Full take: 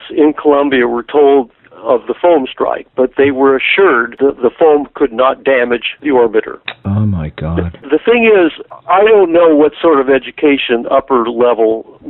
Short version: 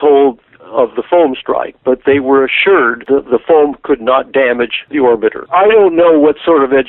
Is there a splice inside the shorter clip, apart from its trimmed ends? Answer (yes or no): yes